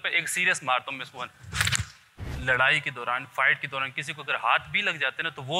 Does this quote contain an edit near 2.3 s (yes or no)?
yes